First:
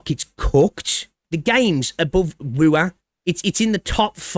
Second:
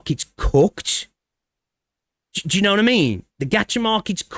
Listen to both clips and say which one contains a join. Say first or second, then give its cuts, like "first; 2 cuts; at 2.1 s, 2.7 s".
first; 2 cuts; at 1.1 s, 3.0 s